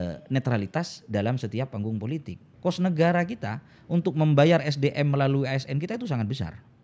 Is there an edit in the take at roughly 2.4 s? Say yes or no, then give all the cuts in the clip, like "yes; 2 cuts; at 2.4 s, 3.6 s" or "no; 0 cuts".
yes; 1 cut; at 2.4 s